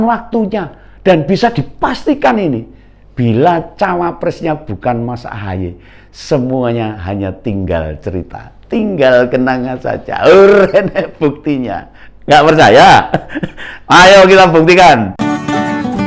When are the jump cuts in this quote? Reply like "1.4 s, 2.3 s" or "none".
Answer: 15.1 s

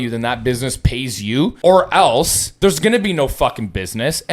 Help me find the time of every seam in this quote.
1.6 s, 2.4 s

